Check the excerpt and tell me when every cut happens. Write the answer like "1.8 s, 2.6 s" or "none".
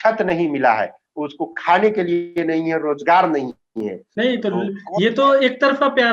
4.0 s